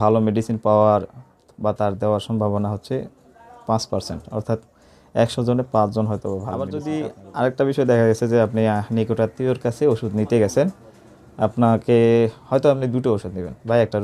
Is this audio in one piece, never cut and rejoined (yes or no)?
no